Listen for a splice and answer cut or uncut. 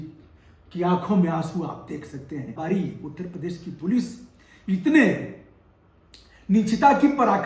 cut